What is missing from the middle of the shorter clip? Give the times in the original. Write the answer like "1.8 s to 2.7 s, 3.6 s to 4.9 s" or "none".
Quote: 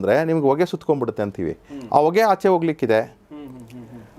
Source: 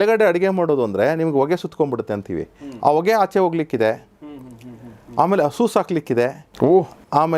none